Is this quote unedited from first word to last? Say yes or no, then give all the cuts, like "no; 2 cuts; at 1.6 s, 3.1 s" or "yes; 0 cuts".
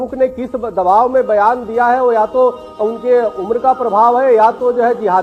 yes; 0 cuts